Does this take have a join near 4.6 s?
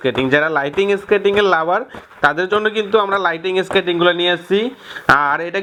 no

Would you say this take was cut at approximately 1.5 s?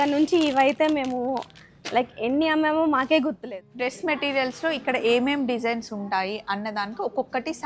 no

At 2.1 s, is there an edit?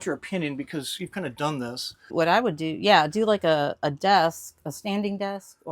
yes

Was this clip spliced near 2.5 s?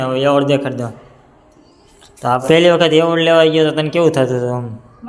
yes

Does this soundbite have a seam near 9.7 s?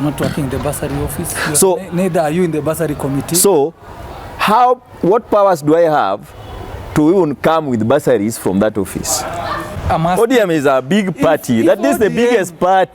yes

